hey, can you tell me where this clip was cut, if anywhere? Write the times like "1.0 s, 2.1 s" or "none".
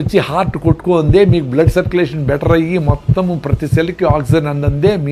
none